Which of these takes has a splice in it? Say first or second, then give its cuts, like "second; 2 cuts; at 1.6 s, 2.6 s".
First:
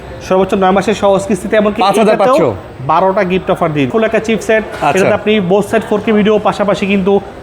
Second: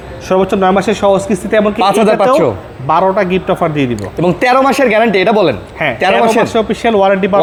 first; 1 cut; at 3.9 s